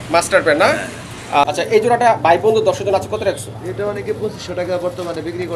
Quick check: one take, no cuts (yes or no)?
no